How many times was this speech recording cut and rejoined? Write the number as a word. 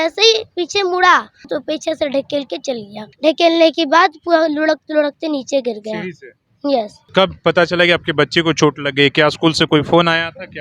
three